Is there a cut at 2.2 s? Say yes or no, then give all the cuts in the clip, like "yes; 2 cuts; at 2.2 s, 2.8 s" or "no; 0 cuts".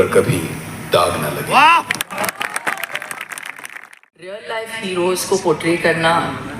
no; 1 cut; at 4.4 s